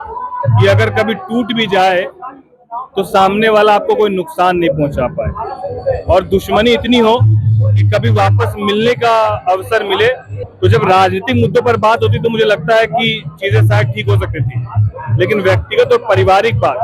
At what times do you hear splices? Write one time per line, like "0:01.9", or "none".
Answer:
0:10.4